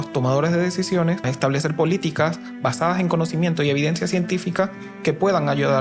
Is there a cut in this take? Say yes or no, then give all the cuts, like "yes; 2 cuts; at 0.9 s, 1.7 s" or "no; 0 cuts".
yes; 1 cut; at 1.3 s